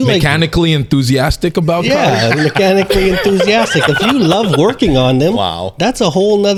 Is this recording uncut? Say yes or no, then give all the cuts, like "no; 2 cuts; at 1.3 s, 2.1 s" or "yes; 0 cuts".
yes; 0 cuts